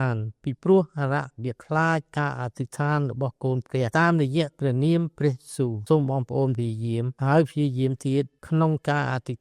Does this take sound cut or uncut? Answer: cut